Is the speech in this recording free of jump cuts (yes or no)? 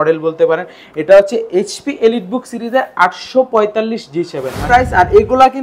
no